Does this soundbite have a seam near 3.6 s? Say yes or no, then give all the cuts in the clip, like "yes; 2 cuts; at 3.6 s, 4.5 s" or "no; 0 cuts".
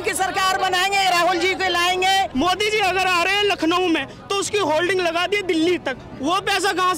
no; 1 cut; at 2.3 s